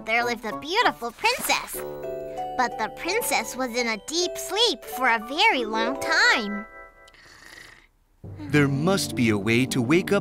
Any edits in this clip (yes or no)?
no